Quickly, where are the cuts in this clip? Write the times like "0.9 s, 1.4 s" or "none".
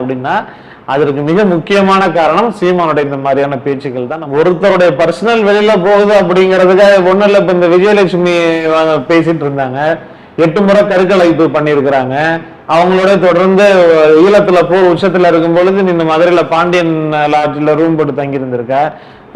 4.1 s